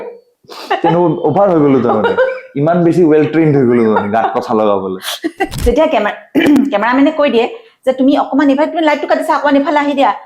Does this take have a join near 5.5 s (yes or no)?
yes